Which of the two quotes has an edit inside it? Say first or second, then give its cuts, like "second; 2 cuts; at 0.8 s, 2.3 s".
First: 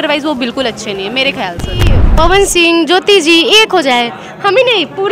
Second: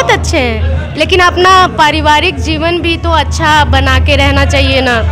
first; 1 cut; at 2.0 s